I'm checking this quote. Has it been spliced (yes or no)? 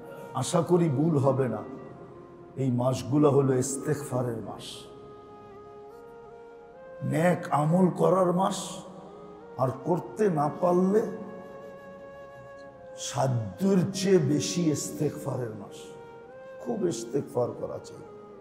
no